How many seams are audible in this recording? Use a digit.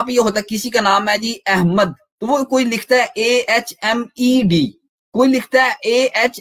1